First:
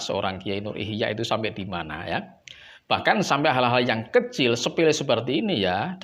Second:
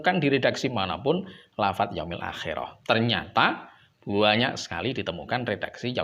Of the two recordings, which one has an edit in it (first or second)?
second